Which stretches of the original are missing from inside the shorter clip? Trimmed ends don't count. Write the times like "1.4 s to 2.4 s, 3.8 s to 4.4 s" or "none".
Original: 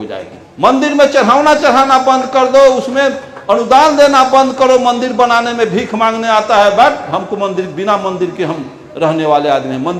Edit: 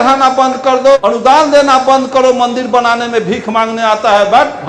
2.6 s to 3.4 s